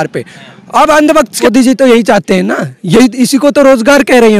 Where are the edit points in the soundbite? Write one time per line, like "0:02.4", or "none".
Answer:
0:01.4